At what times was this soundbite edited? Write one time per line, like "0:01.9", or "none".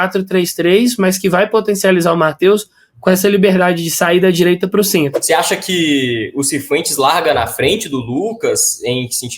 0:05.2

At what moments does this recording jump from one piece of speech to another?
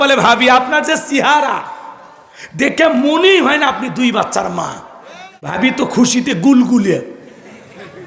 0:05.6

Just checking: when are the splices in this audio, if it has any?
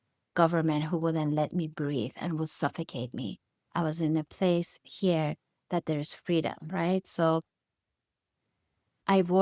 none

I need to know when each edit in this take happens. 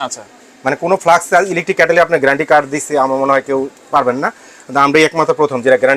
none

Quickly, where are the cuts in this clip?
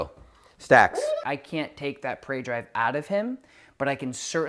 0:01.2

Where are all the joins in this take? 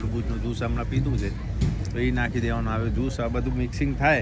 none

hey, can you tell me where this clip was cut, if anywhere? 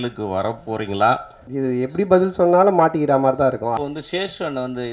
0:01.4
0:03.7

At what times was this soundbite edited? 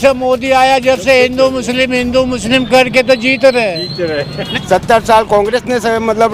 0:04.4

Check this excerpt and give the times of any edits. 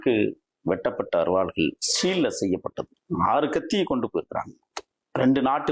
0:02.9

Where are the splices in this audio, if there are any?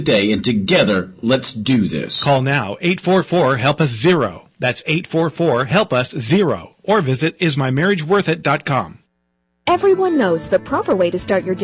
0:09.6

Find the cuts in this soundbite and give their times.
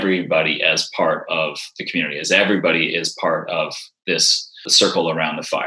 0:04.6

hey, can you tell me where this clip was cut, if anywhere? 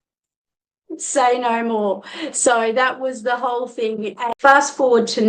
0:04.2

